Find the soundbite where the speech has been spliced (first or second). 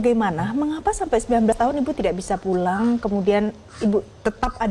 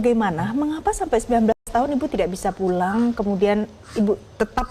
first